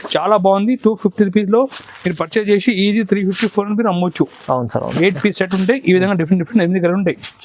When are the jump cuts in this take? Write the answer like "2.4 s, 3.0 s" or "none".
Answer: none